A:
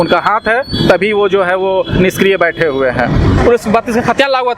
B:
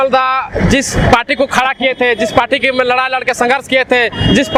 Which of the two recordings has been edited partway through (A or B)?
A